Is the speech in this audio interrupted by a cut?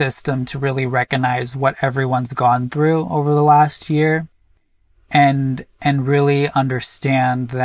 no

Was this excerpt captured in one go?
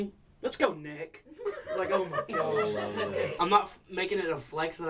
no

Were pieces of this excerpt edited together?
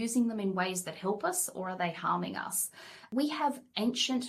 yes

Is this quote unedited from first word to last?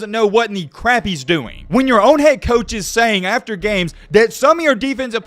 no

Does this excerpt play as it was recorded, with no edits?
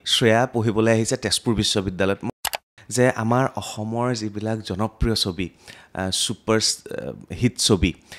no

